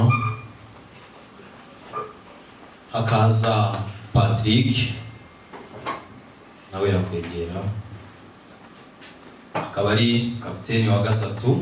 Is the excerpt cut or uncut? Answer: uncut